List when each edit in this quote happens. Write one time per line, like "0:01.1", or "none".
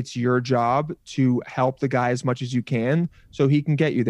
none

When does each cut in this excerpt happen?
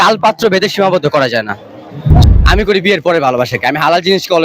0:02.2

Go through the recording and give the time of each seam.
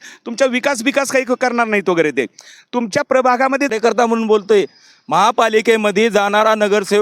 0:03.7

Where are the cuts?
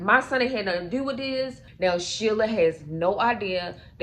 0:01.6

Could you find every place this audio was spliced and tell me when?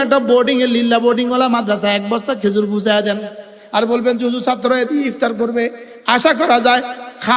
none

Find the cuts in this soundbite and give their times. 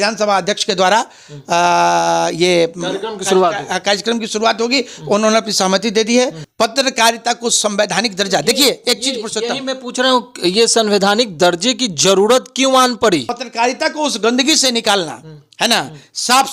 0:06.4
0:13.4

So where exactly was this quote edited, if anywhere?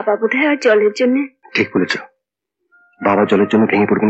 0:01.4

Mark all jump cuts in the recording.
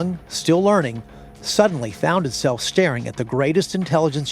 none

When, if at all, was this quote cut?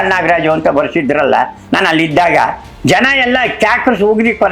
none

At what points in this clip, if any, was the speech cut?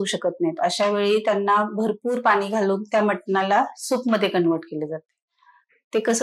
none

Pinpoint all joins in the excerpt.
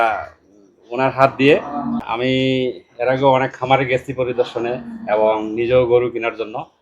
0:02.1

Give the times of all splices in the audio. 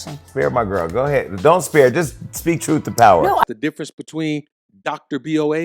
0:03.4

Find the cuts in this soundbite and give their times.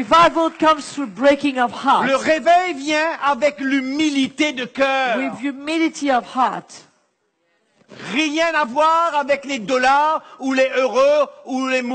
none

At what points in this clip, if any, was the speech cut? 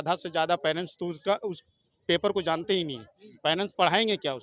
none

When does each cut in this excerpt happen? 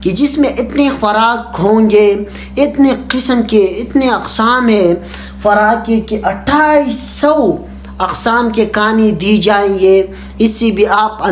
none

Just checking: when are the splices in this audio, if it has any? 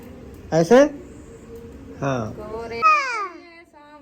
0:02.8

